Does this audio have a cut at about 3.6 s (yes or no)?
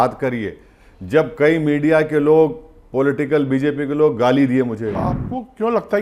no